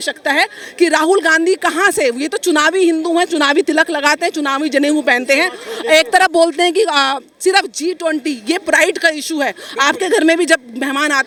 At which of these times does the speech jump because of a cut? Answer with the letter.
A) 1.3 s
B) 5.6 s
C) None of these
C